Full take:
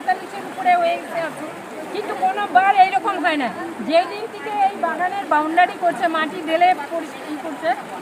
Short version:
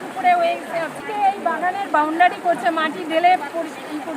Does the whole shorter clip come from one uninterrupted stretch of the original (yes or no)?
no